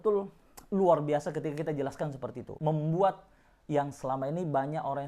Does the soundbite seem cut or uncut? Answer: cut